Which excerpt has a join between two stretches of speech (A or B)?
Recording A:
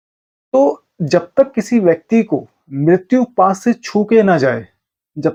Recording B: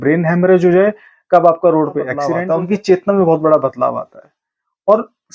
B